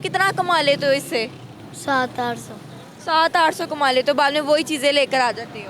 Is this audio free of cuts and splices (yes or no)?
yes